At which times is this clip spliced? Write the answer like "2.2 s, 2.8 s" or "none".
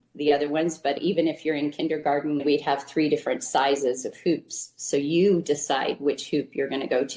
1.0 s